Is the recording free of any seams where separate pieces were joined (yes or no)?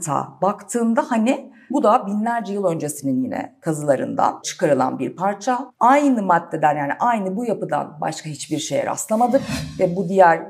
no